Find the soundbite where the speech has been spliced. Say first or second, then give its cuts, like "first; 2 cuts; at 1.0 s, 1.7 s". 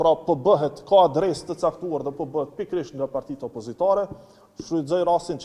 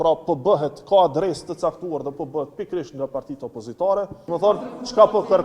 second; 1 cut; at 4.2 s